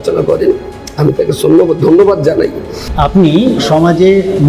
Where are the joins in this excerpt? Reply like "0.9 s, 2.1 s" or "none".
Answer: 2.8 s